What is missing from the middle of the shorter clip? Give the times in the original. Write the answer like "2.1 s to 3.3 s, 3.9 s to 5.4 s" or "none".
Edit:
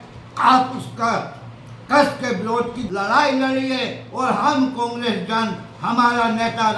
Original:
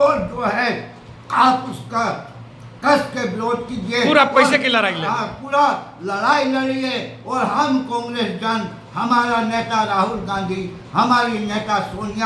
3.7 s to 5.9 s